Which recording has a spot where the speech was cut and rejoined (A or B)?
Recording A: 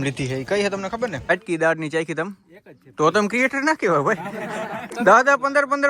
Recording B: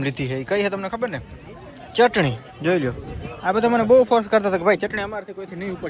A